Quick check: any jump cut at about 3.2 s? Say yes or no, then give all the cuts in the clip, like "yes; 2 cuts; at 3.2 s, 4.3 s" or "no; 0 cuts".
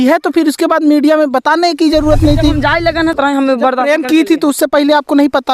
yes; 1 cut; at 3.2 s